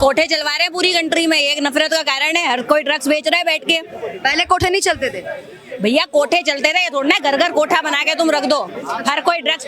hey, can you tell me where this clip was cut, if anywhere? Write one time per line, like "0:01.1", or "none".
none